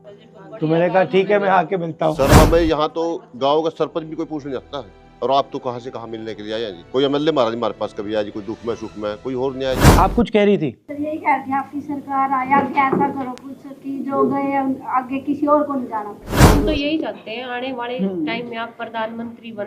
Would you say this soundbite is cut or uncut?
cut